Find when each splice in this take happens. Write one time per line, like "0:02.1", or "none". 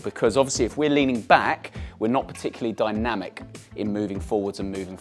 none